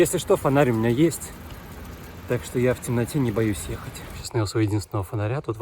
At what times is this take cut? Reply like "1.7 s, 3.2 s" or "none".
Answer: 4.2 s